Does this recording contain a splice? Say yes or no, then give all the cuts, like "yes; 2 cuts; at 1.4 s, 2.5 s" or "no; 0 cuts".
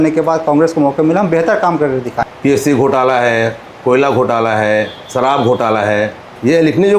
yes; 1 cut; at 2.2 s